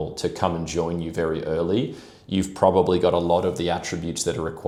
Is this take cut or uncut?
uncut